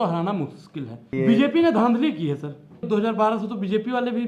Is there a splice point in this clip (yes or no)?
yes